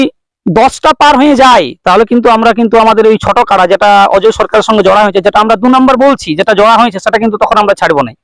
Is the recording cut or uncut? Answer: uncut